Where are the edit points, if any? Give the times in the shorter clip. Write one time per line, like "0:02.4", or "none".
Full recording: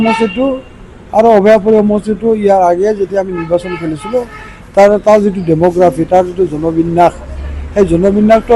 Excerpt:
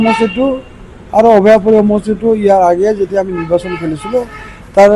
none